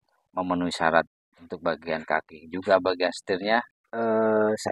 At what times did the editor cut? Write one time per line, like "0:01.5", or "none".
0:03.8